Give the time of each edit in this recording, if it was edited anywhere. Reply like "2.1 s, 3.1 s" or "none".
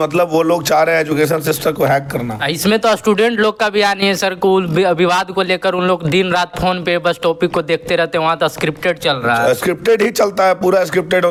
none